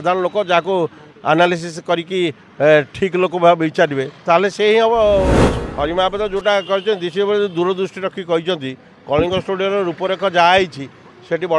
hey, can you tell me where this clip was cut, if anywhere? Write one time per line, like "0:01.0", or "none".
0:05.5